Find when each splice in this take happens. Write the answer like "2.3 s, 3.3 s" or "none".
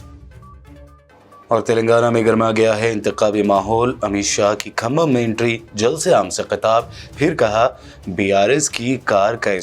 none